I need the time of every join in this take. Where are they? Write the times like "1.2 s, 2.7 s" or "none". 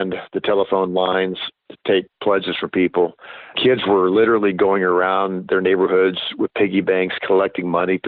3.6 s